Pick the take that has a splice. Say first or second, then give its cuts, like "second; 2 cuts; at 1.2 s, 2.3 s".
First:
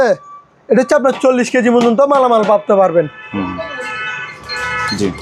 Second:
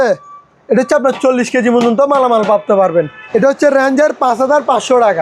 second; 1 cut; at 3.2 s